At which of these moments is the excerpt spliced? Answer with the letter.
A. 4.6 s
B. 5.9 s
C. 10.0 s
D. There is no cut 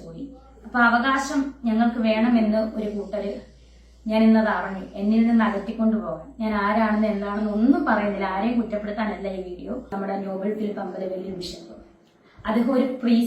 C